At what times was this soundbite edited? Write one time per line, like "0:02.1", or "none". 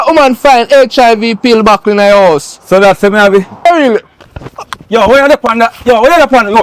0:03.7

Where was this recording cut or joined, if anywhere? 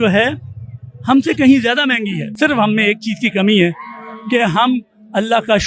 0:02.3

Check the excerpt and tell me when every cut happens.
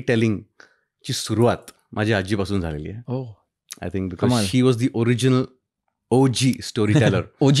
none

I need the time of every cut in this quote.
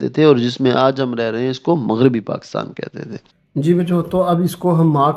0:03.4

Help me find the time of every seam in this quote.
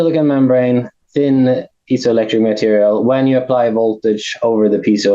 0:00.9

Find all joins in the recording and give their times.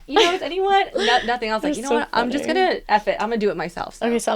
0:02.8

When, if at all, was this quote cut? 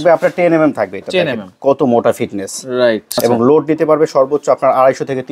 0:03.1

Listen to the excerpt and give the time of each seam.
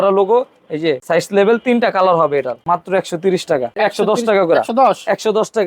0:01.0
0:02.5
0:03.8

